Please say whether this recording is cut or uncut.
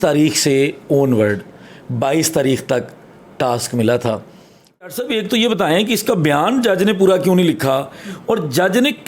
cut